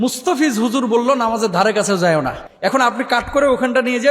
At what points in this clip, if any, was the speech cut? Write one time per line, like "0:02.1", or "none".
0:02.4